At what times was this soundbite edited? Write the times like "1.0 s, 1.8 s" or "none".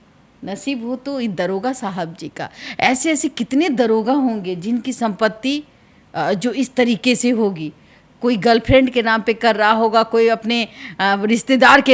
none